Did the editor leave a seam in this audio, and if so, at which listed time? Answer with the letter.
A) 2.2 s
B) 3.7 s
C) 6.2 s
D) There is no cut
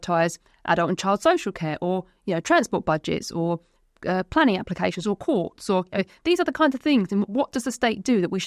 D